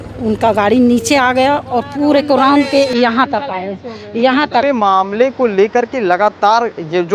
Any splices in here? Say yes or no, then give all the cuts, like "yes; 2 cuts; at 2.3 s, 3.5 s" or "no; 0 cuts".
yes; 1 cut; at 4.6 s